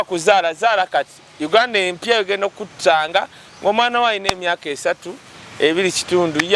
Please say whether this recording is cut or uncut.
uncut